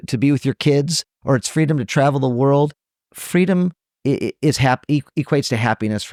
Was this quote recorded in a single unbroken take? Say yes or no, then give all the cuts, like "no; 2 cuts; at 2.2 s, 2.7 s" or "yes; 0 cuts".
yes; 0 cuts